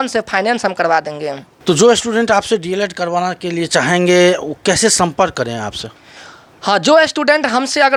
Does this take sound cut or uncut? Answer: uncut